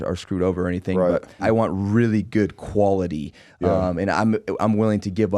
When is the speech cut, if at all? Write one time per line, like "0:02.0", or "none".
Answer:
0:01.4